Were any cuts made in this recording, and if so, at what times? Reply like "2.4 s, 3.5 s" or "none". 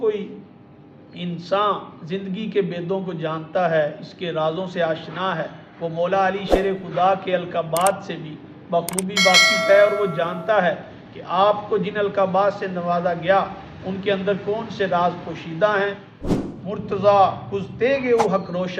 16.2 s